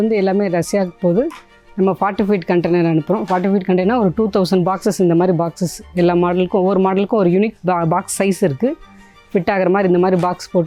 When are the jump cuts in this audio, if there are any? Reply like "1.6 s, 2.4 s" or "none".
none